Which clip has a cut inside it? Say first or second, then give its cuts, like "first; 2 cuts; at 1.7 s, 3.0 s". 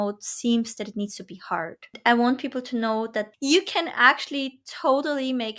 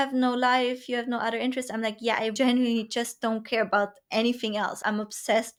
first; 2 cuts; at 1.9 s, 3.3 s